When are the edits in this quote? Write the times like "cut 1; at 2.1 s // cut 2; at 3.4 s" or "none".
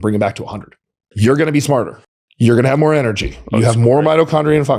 cut 1; at 1.1 s // cut 2; at 2.2 s

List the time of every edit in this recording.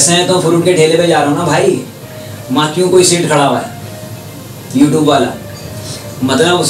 none

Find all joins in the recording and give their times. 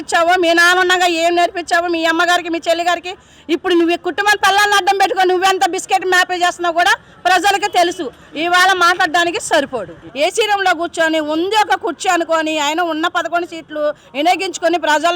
cut 1; at 10.1 s

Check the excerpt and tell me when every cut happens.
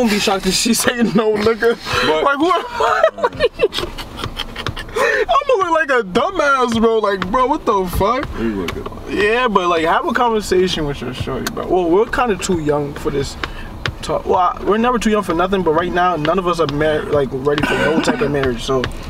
none

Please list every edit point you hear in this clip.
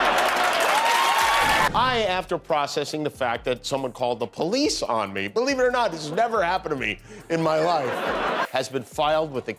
cut 1; at 8.5 s

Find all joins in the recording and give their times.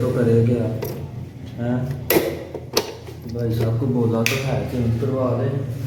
none

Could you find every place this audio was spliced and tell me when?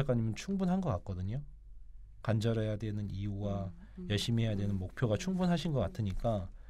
none

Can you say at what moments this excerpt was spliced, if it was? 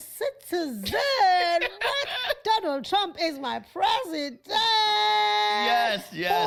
none

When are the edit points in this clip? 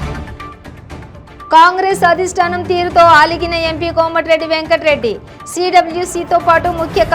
cut 1; at 1.2 s

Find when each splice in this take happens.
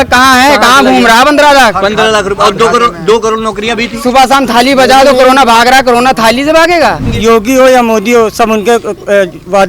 cut 1; at 7.1 s

